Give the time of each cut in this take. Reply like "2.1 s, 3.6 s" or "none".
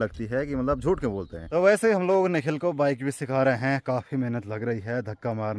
1.4 s